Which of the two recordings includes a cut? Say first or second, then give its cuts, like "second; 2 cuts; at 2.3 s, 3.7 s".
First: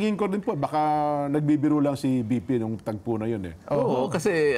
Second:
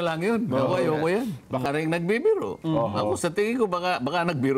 second; 1 cut; at 1.6 s